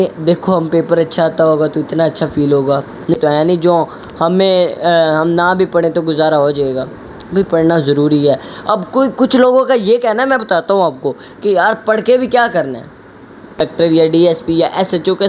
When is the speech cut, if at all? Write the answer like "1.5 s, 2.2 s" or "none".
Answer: 3.2 s, 13.5 s